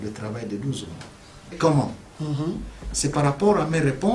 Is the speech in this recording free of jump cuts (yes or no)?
no